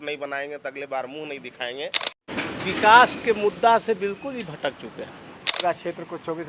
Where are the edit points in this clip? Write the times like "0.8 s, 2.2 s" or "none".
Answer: 2.3 s, 5.6 s

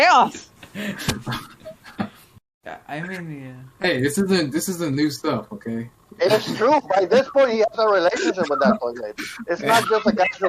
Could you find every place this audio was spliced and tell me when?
none

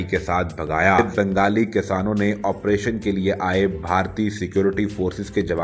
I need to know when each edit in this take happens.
1.0 s

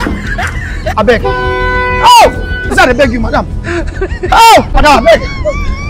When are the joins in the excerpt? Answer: 2.7 s, 4.7 s

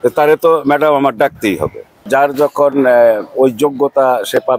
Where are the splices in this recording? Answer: 2.0 s

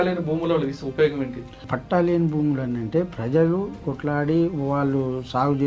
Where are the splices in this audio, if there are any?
1.7 s, 3.9 s

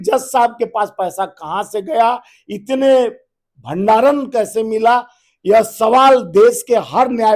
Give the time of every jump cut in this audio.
none

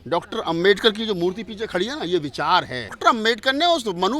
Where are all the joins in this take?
3.0 s

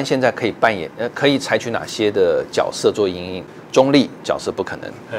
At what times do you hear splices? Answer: 3.5 s

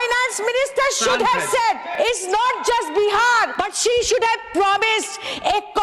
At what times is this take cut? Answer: 1.9 s, 3.5 s

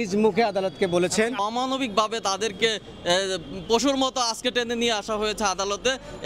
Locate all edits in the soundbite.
1.4 s

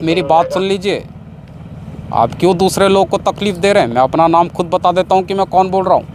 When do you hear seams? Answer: none

